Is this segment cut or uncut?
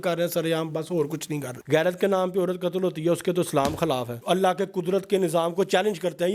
cut